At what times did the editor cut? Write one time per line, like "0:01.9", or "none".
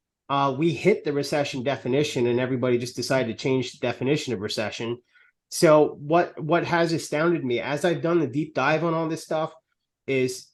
none